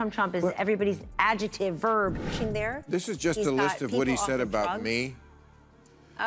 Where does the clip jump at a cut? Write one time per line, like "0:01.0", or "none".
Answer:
0:02.2